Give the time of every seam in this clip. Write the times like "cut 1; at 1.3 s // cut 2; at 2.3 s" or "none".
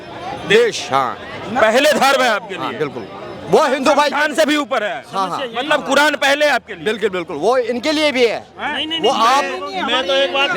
none

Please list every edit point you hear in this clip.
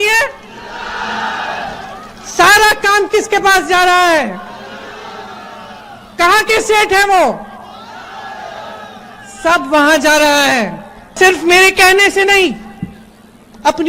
cut 1; at 11.1 s

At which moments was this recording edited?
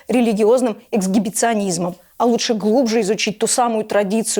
none

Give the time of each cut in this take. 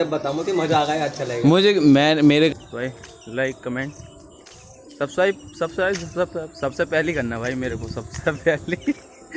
cut 1; at 2.5 s

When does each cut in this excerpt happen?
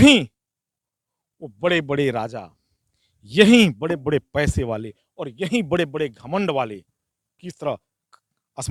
none

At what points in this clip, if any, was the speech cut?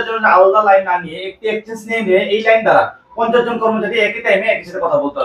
none

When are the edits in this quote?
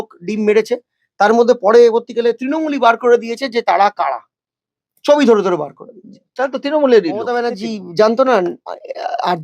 cut 1; at 7.5 s

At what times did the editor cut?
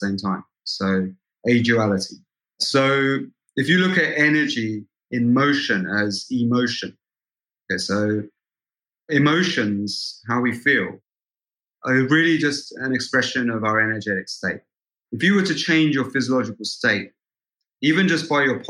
cut 1; at 14.9 s

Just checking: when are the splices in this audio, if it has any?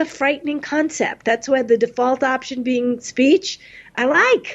none

